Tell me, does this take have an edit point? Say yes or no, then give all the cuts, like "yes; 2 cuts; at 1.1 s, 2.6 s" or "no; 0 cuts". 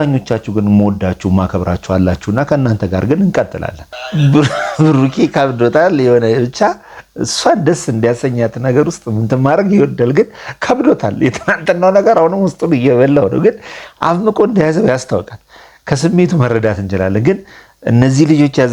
yes; 1 cut; at 4.1 s